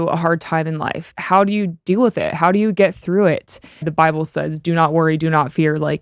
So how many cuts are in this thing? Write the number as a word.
two